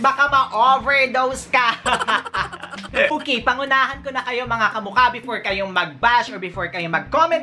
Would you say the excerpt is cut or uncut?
uncut